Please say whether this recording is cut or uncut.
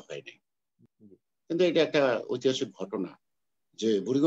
cut